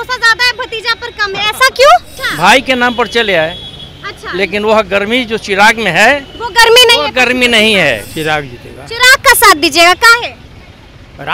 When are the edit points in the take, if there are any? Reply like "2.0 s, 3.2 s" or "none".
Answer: 2.2 s, 8.1 s